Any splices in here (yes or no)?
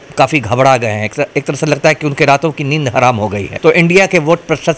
yes